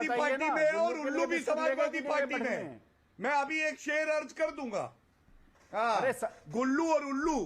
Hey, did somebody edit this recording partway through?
no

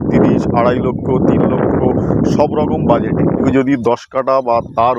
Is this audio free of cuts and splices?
no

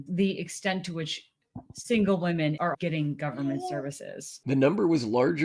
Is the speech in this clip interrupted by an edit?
yes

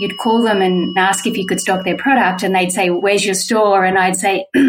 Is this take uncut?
no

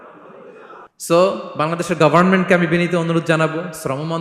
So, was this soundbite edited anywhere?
yes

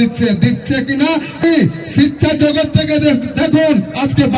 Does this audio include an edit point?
yes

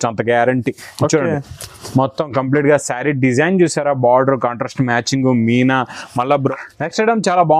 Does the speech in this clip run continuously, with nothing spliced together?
no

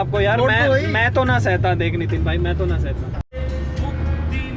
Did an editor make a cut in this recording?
yes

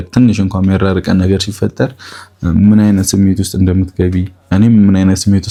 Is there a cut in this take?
no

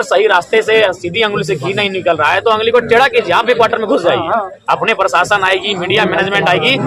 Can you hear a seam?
no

